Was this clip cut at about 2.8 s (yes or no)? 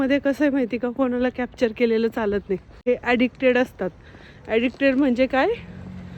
yes